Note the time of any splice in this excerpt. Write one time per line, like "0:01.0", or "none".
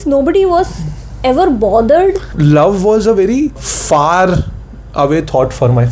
0:02.3
0:03.7